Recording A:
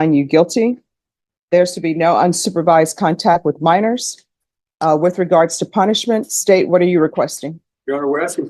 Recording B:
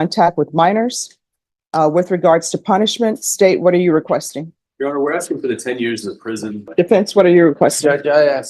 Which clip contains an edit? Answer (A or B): B